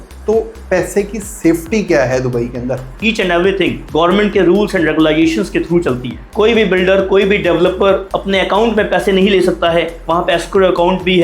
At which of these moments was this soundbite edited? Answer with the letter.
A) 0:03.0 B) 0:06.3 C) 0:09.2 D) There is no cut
A